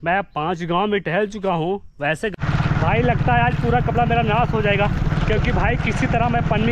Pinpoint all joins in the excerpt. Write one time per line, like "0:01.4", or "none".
0:02.3